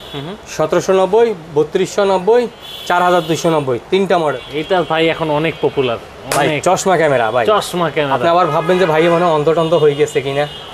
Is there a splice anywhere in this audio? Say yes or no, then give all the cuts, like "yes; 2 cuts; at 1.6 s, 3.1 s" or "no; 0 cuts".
yes; 1 cut; at 4.4 s